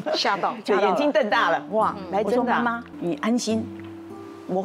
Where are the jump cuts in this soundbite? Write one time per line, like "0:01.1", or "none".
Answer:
0:02.9